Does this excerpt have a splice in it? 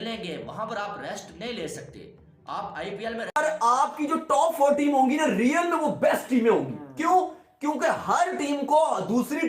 yes; 1 cut; at 3.4 s

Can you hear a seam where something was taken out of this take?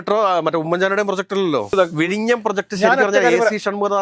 yes; 1 cut; at 1.8 s

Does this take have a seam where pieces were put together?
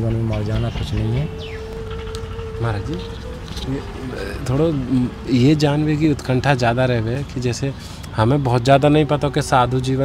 no; 0 cuts

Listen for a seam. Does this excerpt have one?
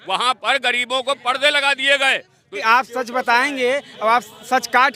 yes; 1 cut; at 2.6 s

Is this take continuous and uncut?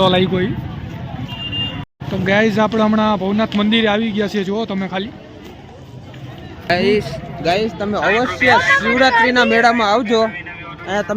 no; 2 cuts; at 1.8 s, 6.7 s

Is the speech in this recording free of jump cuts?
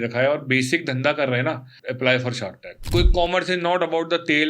no; 2 cuts; at 1.7 s, 2.7 s

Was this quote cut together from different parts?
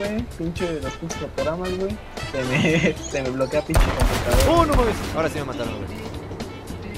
yes; 1 cut; at 2.1 s

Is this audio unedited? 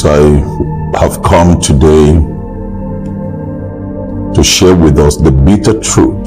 yes; 0 cuts

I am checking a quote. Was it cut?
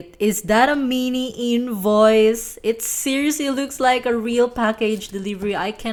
no; 0 cuts

